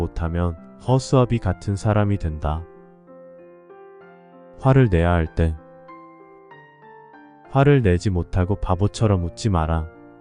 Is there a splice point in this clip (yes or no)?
yes